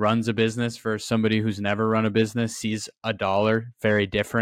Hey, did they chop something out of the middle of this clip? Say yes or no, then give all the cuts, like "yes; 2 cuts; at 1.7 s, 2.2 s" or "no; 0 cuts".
no; 0 cuts